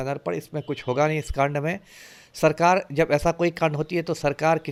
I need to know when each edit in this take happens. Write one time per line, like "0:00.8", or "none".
none